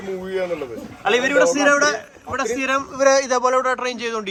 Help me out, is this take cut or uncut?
uncut